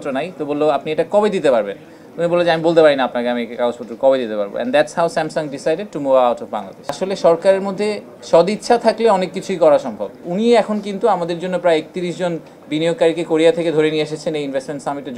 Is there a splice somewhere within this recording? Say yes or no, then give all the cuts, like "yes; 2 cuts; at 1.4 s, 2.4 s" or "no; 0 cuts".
yes; 2 cuts; at 7.0 s, 10.2 s